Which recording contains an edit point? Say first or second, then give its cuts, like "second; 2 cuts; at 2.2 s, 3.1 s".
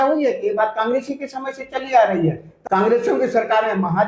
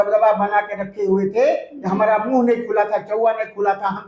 first; 1 cut; at 2.5 s